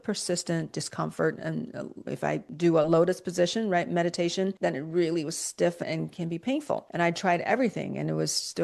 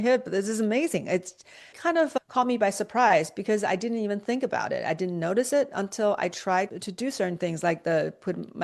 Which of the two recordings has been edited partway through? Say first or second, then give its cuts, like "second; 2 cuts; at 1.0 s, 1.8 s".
first; 3 cuts; at 2.5 s, 4.5 s, 6.9 s